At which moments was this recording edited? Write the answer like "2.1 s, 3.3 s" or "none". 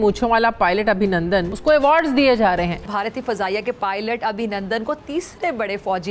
1.5 s, 2.8 s